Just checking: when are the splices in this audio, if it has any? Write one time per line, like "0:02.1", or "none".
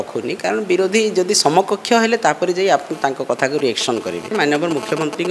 0:04.3